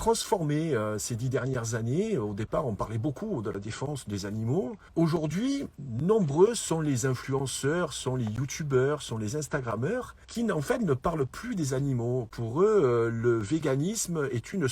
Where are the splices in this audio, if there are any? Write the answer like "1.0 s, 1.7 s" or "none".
4.8 s, 5.8 s, 10.2 s